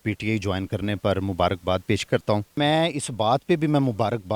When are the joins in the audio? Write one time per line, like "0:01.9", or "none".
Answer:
none